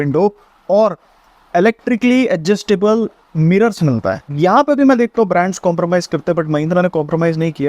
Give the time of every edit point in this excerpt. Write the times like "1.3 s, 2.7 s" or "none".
4.3 s